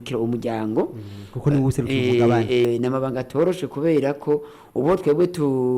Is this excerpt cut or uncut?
cut